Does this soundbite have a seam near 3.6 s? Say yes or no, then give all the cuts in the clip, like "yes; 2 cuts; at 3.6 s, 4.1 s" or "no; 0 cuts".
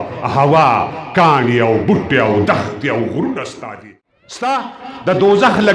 yes; 1 cut; at 3.6 s